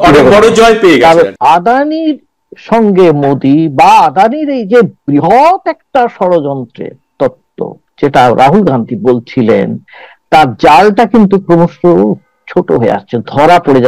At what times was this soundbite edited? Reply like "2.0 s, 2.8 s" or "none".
1.3 s